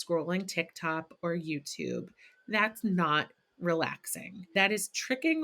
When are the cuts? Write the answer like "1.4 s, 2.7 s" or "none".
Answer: 4.5 s